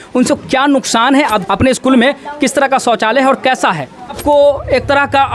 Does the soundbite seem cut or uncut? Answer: cut